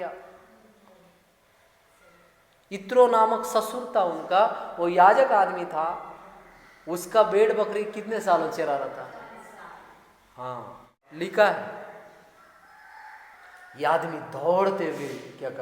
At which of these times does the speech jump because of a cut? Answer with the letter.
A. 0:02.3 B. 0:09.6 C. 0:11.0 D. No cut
C